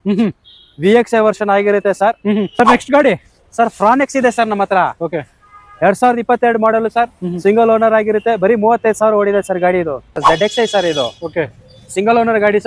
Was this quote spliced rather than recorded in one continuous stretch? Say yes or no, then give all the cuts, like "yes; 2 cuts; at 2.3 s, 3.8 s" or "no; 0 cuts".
yes; 2 cuts; at 2.6 s, 10.0 s